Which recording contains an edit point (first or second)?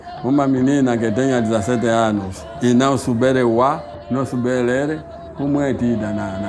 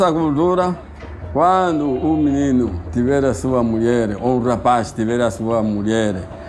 first